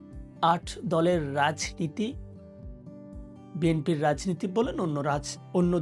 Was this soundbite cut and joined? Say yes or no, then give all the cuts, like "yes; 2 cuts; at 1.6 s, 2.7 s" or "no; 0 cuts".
yes; 2 cuts; at 2.2 s, 3.5 s